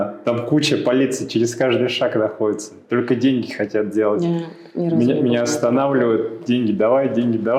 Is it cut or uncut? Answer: uncut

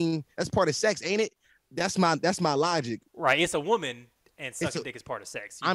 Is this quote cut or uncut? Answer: cut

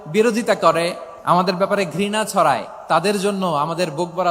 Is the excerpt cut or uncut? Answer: cut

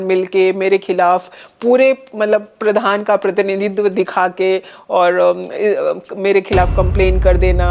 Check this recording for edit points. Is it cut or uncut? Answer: uncut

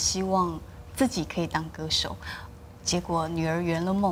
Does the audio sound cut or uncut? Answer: uncut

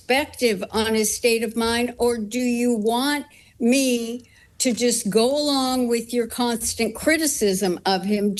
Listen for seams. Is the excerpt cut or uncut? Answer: uncut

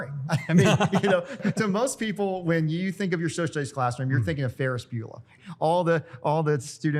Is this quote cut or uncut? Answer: cut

